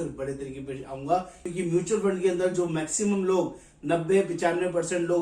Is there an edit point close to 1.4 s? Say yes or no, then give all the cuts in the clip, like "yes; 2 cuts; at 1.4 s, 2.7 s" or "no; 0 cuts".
yes; 1 cut; at 1.4 s